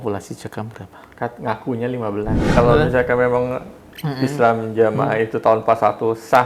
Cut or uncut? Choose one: cut